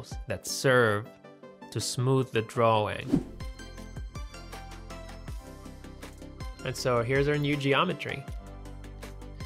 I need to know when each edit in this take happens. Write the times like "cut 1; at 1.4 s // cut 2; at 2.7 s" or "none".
cut 1; at 3.1 s